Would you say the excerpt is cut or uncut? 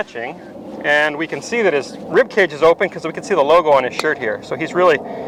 uncut